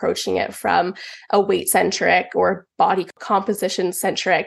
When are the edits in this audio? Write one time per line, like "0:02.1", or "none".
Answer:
0:03.2